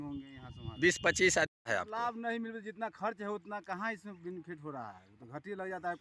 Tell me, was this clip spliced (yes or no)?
yes